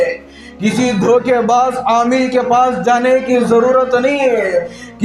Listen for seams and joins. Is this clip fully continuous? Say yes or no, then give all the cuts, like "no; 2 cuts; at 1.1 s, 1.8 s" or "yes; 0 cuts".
yes; 0 cuts